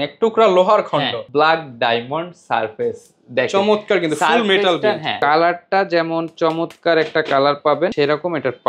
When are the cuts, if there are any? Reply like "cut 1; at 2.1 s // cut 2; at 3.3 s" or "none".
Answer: cut 1; at 1.2 s // cut 2; at 5.1 s // cut 3; at 7.9 s